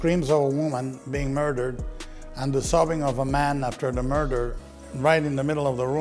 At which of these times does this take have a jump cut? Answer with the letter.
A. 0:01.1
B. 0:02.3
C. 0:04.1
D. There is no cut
D